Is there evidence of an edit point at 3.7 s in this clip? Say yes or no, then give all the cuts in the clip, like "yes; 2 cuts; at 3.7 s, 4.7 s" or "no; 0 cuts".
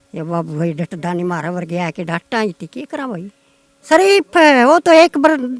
yes; 1 cut; at 3.7 s